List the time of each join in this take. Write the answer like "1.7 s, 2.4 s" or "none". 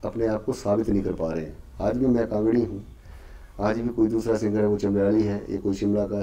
none